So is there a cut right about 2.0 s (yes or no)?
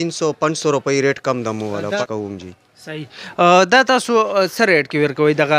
yes